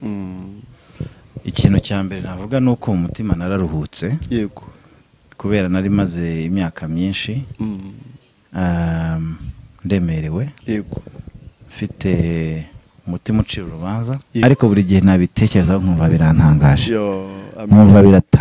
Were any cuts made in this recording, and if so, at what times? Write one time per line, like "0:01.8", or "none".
0:14.4